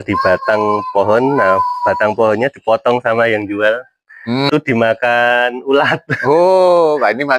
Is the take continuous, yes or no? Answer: no